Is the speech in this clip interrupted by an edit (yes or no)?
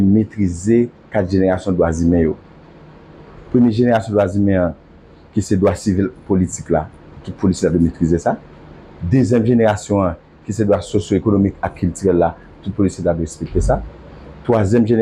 no